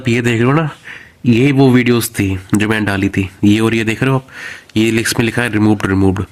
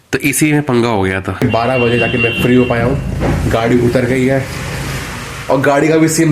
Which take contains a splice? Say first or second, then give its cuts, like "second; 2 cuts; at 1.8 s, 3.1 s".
second; 1 cut; at 1.4 s